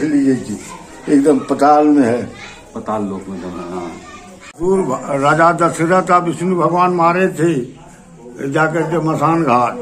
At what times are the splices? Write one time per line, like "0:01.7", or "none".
0:04.5